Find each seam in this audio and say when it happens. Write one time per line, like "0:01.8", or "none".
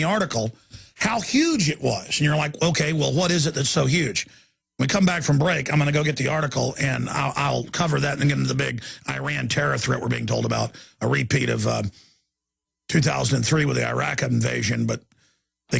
0:07.1